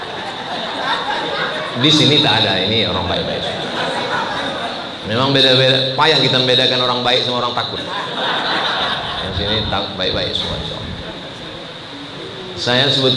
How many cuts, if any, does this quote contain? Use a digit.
0